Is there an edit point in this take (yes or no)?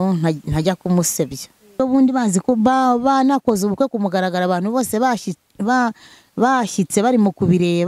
yes